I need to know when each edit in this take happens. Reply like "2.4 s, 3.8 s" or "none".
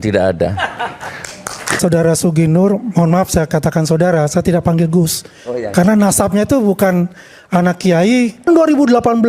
1.8 s, 8.5 s